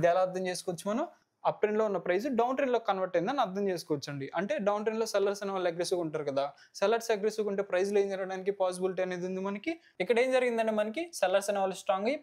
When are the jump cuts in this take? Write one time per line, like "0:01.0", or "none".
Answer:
0:01.2
0:09.9